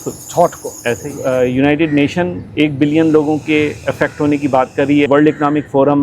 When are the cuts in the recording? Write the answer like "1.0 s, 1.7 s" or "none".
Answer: 1.1 s, 5.1 s